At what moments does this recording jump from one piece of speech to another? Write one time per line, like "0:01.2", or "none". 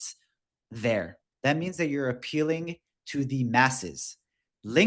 0:01.2